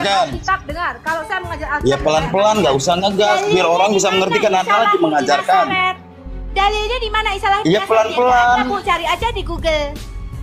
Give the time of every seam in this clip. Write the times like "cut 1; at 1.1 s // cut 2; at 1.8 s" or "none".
none

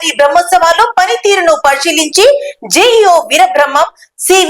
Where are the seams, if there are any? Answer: none

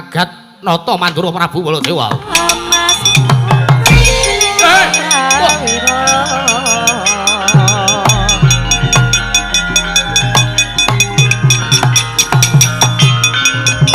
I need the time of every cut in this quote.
cut 1; at 2.3 s

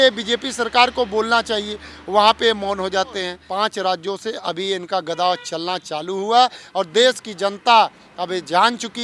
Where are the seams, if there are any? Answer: cut 1; at 3.4 s

